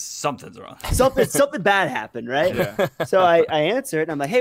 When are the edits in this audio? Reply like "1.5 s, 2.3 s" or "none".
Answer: none